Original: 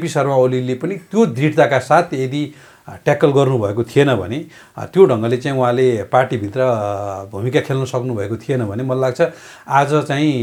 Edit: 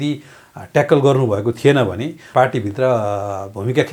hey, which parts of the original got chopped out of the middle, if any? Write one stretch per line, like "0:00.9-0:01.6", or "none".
0:04.6-0:06.0